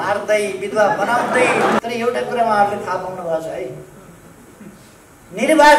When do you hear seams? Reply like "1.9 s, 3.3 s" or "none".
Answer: 1.8 s

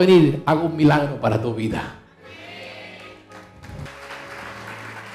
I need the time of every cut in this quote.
3.9 s

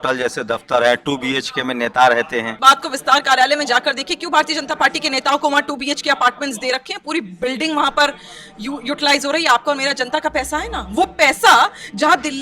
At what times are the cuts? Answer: 2.6 s

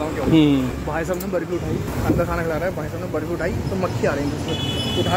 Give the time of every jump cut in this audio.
0.8 s, 1.9 s

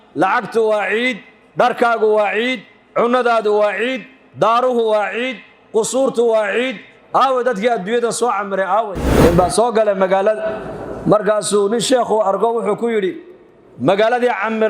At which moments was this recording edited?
9.1 s

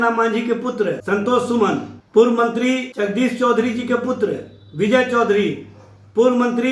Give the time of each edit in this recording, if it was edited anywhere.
1.0 s, 2.0 s, 2.9 s

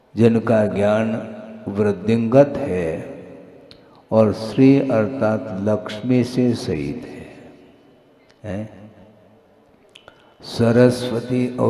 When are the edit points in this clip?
none

